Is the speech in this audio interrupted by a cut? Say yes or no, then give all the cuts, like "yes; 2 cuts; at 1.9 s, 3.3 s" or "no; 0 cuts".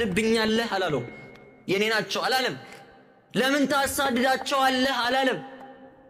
no; 0 cuts